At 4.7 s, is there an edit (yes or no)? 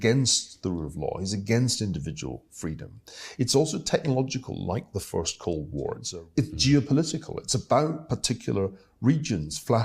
no